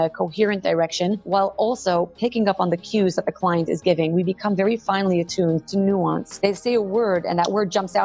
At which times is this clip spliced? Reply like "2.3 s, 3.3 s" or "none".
1.2 s, 6.3 s